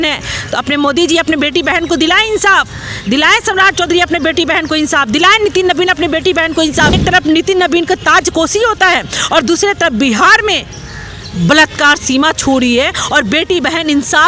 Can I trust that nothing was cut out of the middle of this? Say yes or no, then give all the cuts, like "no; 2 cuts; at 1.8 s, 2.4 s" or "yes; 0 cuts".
no; 1 cut; at 7.0 s